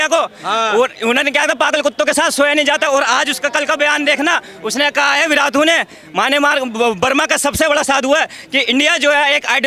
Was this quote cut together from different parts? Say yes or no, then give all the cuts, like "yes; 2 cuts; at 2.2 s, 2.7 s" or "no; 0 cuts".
no; 0 cuts